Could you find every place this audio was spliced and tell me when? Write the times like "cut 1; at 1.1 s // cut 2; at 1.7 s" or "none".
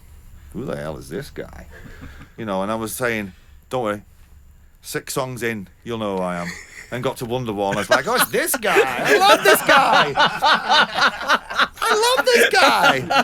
none